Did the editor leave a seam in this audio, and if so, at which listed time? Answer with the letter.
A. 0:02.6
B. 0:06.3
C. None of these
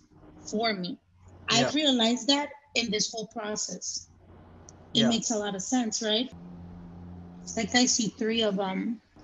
B